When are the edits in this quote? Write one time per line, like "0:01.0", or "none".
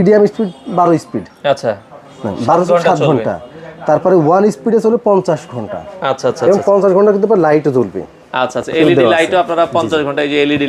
none